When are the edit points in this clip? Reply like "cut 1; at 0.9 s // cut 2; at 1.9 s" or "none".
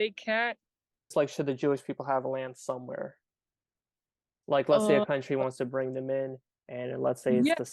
cut 1; at 1.1 s